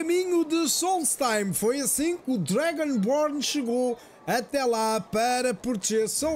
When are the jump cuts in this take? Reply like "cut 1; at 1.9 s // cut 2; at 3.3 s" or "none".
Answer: none